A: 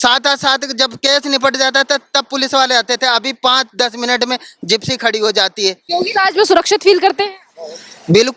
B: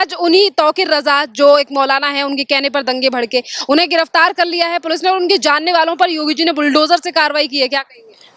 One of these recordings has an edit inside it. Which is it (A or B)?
A